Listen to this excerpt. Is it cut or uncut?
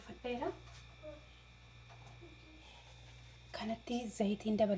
uncut